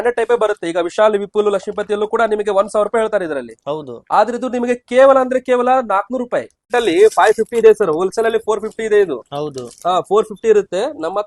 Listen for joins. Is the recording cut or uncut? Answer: cut